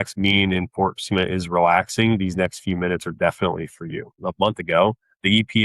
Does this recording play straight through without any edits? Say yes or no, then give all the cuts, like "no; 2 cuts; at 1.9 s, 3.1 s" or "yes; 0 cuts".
no; 1 cut; at 4.1 s